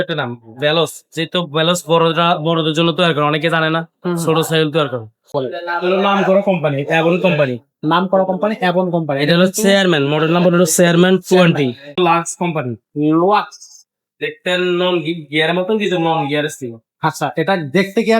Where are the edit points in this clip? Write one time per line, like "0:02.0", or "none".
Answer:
0:05.2
0:12.0